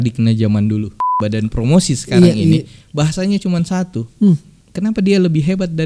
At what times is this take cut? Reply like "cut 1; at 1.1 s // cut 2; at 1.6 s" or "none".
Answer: cut 1; at 1.0 s // cut 2; at 4.6 s